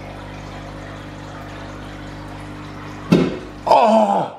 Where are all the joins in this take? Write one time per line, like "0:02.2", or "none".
0:03.5